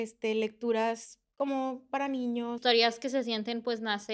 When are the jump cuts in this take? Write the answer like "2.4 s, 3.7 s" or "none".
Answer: 2.6 s